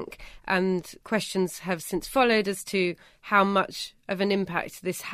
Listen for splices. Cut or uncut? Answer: cut